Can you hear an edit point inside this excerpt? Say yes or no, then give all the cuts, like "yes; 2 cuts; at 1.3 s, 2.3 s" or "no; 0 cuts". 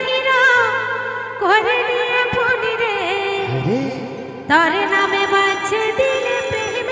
no; 0 cuts